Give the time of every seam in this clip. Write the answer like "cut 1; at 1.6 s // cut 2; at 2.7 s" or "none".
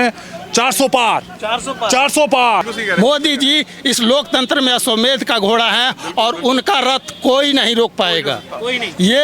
cut 1; at 2.7 s